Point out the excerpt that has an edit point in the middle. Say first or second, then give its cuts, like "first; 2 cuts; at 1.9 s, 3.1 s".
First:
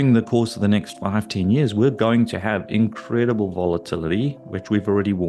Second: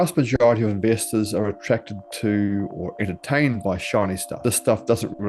second; 1 cut; at 4.4 s